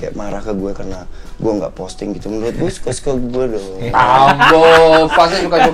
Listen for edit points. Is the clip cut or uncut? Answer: uncut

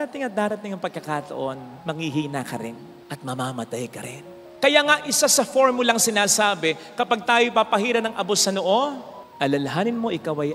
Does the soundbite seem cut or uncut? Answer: uncut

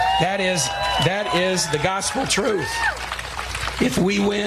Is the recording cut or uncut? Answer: cut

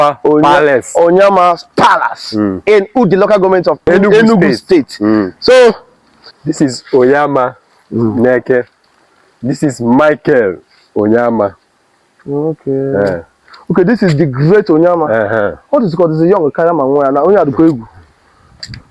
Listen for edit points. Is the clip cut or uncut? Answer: cut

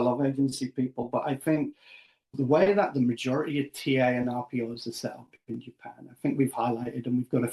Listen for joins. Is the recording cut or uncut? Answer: cut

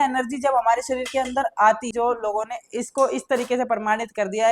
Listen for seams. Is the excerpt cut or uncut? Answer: cut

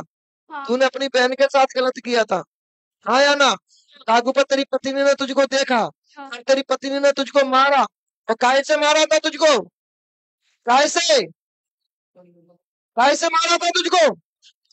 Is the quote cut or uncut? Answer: uncut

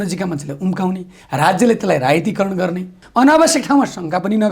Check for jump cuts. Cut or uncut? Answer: cut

